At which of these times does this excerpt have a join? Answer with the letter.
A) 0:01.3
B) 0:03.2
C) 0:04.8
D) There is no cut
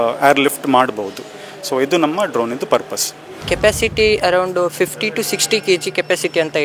D